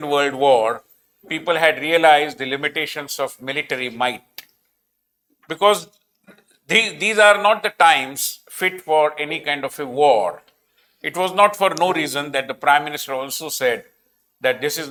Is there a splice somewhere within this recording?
no; 0 cuts

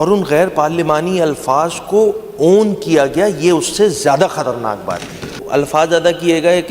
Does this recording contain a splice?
yes; 1 cut; at 5.4 s

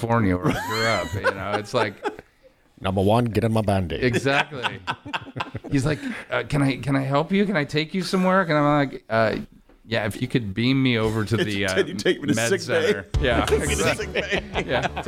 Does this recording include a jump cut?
no; 0 cuts

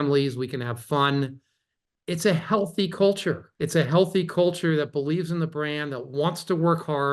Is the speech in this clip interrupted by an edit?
yes; 1 cut; at 3.5 s

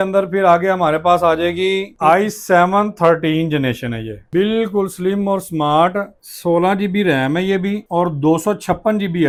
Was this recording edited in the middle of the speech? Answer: no; 0 cuts

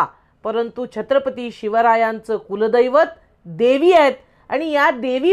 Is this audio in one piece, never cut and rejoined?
yes; 0 cuts

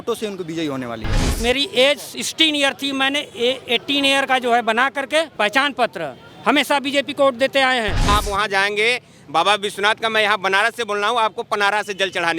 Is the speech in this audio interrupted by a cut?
yes; 3 cuts; at 1.3 s, 5.4 s, 8.0 s

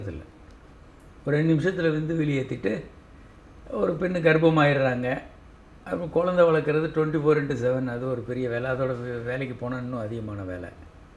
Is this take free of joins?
yes; 0 cuts

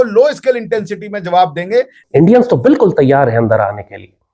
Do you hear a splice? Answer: yes; 1 cut; at 2.0 s

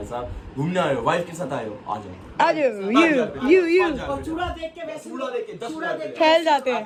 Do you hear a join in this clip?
no; 0 cuts

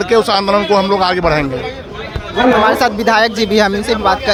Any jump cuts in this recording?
no; 0 cuts

